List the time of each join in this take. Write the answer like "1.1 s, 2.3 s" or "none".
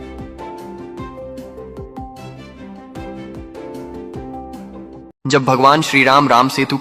1.2 s